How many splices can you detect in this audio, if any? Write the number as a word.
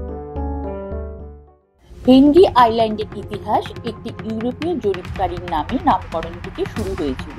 one